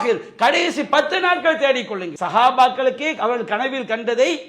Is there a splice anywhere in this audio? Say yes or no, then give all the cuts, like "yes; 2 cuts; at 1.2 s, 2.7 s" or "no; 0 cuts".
yes; 1 cut; at 2.1 s